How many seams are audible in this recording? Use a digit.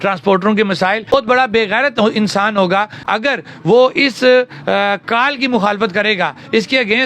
2